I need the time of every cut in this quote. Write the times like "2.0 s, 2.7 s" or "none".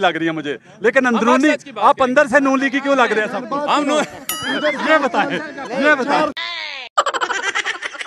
none